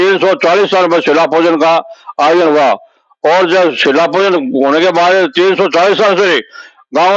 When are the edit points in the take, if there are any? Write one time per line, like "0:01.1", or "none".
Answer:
none